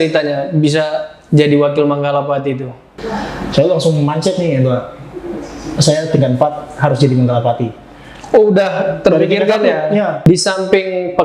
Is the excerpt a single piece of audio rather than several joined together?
no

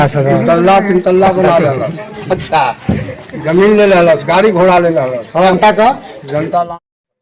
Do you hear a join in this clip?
yes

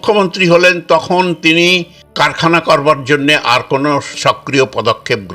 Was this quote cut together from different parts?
yes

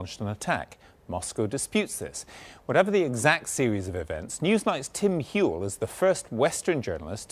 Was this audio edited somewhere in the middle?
yes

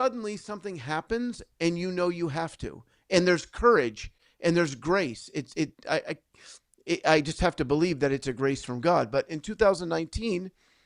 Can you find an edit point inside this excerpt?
no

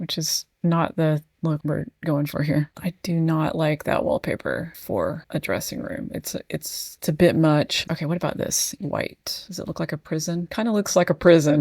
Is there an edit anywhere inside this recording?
yes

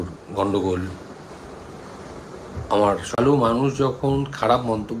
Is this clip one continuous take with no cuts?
no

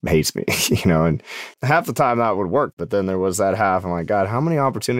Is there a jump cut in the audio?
yes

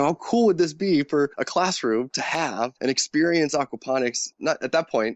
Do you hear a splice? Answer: yes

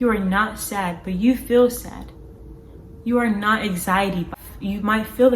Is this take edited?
yes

